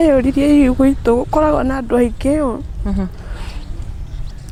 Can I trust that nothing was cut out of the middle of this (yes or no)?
yes